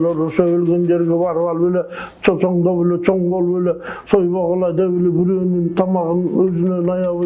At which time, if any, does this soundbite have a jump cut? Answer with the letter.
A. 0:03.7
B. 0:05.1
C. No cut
C